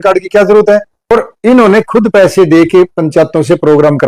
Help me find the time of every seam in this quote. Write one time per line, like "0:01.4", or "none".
0:01.0